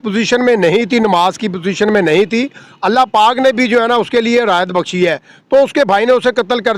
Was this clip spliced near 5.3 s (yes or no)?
no